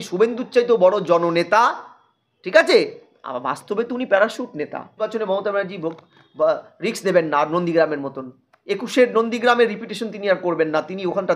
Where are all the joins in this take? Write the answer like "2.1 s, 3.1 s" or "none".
5.0 s